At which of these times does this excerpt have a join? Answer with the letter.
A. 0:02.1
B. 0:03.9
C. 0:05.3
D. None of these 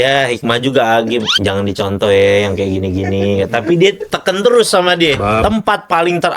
C